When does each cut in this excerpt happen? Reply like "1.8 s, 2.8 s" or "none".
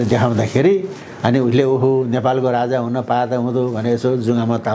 none